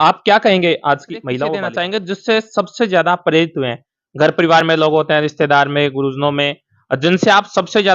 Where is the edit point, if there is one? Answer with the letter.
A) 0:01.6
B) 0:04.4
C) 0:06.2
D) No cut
A